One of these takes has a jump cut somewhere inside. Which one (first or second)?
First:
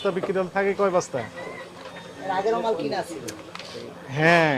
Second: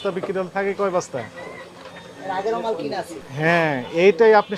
second